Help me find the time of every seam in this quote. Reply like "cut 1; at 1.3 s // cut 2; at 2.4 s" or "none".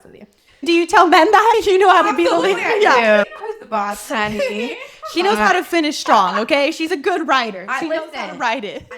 cut 1; at 3.4 s